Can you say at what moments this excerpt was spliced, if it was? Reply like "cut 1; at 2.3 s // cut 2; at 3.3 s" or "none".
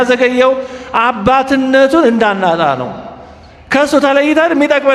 none